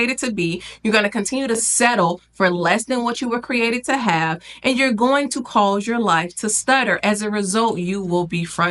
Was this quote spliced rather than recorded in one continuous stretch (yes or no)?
no